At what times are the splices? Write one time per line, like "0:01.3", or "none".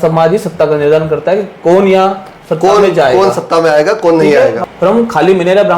0:04.6

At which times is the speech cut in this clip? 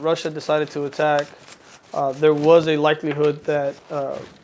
none

